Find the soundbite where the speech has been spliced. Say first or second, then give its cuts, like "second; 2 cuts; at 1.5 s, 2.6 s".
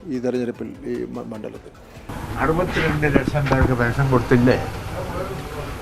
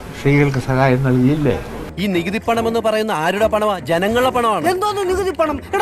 first; 1 cut; at 2.0 s